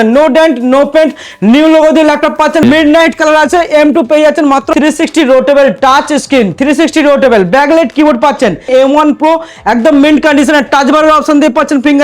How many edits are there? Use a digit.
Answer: 3